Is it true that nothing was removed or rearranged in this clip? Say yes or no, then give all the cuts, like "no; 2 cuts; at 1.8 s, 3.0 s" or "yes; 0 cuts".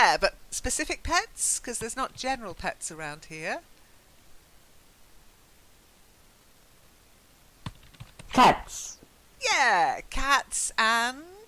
no; 1 cut; at 7.1 s